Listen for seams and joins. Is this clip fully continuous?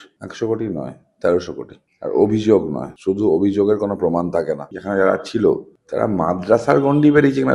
no; 1 cut; at 4.7 s

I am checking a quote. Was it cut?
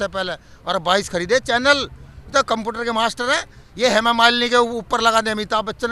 no; 0 cuts

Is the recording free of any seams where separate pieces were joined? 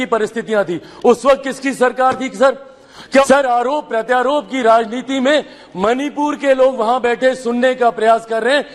no; 1 cut; at 3.2 s

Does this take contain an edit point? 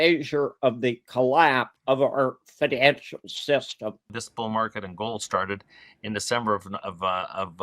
yes; 1 cut; at 4.1 s

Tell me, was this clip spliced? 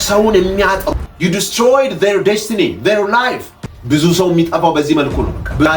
yes; 1 cut; at 1.0 s

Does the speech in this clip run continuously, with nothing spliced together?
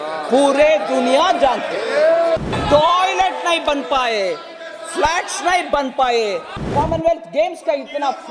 no; 2 cuts; at 2.5 s, 6.7 s

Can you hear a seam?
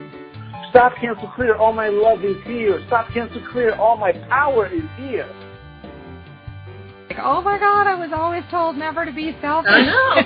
no; 0 cuts

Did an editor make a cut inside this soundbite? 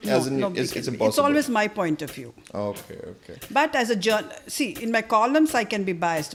no; 0 cuts

